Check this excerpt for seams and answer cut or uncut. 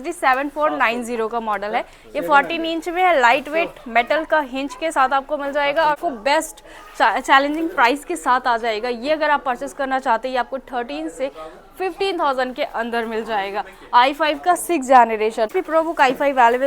cut